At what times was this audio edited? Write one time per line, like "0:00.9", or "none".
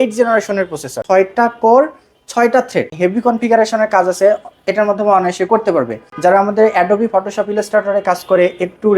0:00.9
0:02.9
0:06.0